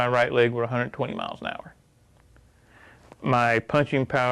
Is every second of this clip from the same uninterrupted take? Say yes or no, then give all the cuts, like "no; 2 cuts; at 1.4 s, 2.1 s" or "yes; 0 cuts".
yes; 0 cuts